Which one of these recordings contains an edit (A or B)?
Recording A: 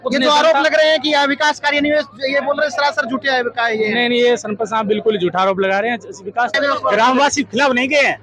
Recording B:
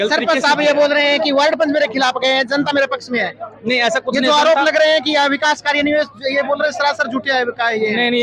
A